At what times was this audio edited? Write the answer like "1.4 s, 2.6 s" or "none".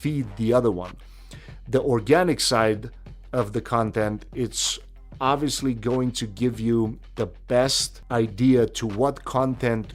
7.9 s